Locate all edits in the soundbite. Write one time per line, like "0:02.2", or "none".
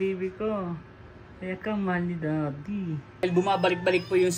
0:03.2